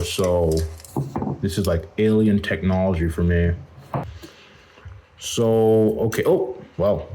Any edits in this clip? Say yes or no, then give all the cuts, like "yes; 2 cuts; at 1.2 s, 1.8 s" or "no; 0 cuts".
yes; 1 cut; at 4.2 s